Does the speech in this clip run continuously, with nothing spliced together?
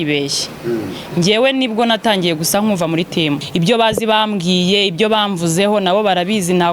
no; 1 cut; at 3.4 s

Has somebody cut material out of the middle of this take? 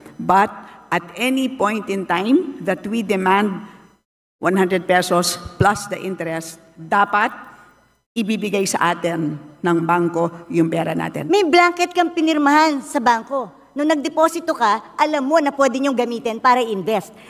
yes; 1 cut; at 11.2 s

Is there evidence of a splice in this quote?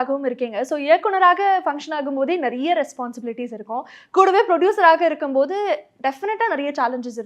no; 0 cuts

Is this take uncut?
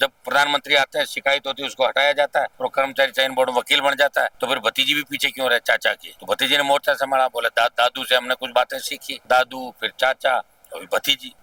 yes; 0 cuts

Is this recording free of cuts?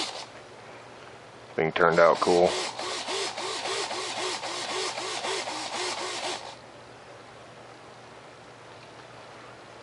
no; 1 cut; at 1.9 s

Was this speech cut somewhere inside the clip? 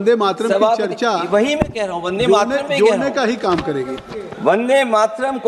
no; 0 cuts

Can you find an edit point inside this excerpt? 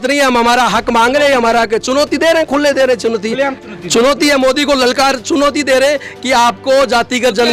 no; 0 cuts

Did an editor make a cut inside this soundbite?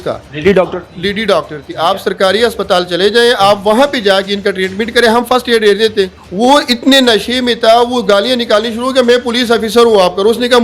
yes; 1 cut; at 6.2 s

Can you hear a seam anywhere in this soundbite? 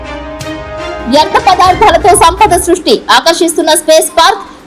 yes; 1 cut; at 1.0 s

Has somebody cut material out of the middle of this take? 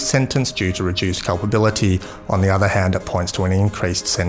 no; 0 cuts

